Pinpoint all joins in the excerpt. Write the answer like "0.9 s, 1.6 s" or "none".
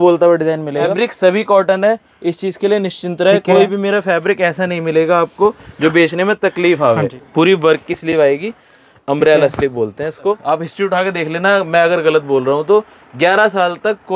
0.9 s, 7.2 s, 10.4 s